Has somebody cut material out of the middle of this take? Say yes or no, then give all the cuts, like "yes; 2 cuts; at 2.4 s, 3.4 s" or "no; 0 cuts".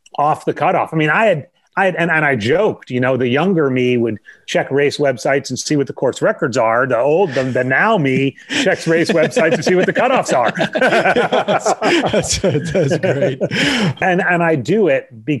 yes; 1 cut; at 14.0 s